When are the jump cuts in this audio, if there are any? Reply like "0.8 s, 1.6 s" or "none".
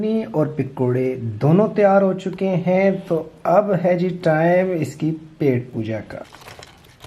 6.1 s